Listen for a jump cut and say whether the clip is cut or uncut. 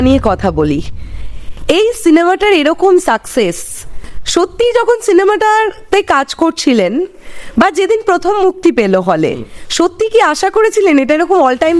uncut